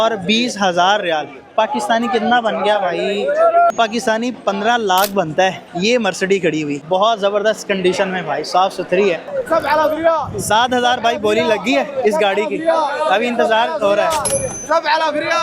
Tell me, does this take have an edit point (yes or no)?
yes